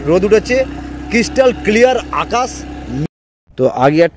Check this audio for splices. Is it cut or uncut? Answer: cut